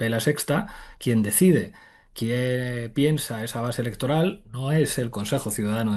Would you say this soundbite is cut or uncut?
uncut